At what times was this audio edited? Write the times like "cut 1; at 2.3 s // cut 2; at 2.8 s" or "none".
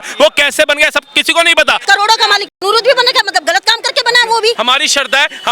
cut 1; at 1.8 s // cut 2; at 4.6 s